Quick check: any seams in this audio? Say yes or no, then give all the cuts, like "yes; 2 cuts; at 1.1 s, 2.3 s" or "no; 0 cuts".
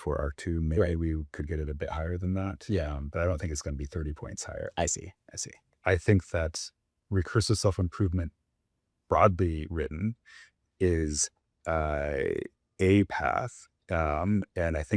yes; 1 cut; at 5.7 s